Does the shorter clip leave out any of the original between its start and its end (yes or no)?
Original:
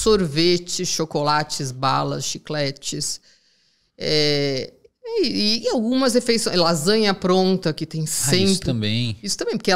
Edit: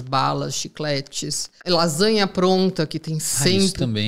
yes